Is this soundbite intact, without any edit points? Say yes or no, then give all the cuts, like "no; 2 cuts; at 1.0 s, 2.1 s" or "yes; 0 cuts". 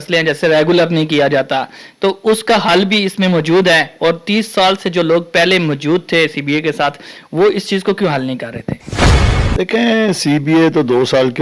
yes; 0 cuts